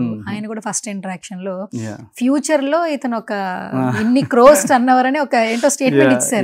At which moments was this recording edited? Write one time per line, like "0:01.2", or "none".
none